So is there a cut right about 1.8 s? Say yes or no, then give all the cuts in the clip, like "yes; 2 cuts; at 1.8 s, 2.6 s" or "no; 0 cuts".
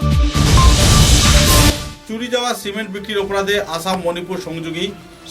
yes; 1 cut; at 1.8 s